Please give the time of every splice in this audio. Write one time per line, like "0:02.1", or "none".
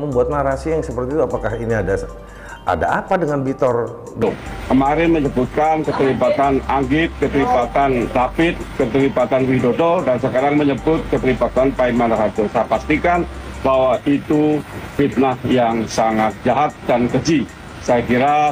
0:04.2

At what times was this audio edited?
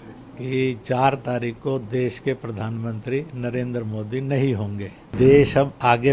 0:05.1

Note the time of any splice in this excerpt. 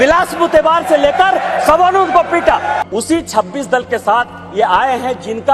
0:02.8

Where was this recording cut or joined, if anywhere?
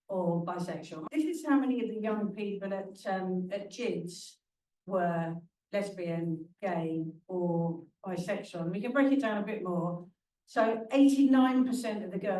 0:01.0

